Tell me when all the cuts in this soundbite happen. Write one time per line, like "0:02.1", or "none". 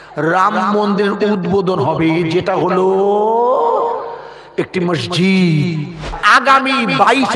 0:06.1